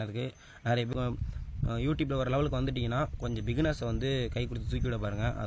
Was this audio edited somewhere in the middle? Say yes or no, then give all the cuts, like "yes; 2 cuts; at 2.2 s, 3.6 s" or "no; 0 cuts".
yes; 1 cut; at 0.9 s